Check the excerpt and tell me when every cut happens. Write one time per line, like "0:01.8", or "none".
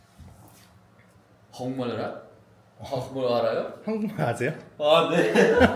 none